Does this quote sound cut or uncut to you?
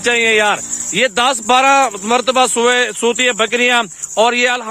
uncut